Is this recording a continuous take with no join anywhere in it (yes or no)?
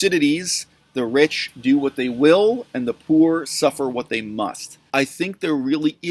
no